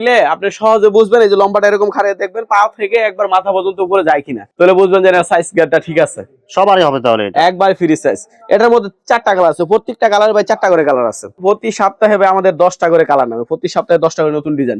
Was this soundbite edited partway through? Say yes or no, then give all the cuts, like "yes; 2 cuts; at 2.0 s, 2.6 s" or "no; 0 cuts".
no; 0 cuts